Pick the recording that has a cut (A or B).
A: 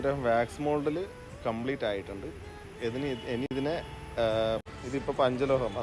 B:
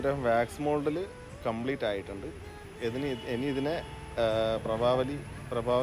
A